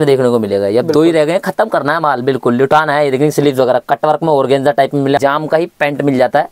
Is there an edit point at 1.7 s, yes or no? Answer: no